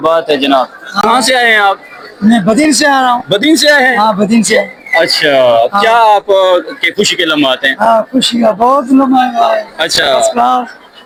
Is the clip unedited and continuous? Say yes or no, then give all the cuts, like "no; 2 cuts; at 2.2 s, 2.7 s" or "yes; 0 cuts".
yes; 0 cuts